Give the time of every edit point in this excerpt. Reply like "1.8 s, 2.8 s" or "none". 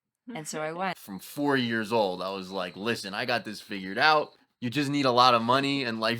1.0 s